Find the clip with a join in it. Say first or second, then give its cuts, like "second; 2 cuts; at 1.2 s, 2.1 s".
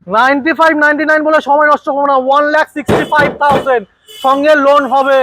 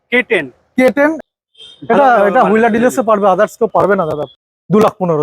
second; 2 cuts; at 1.2 s, 4.0 s